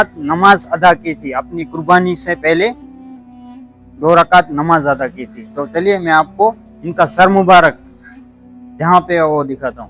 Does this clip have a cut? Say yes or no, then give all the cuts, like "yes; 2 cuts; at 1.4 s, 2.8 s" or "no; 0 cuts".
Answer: no; 0 cuts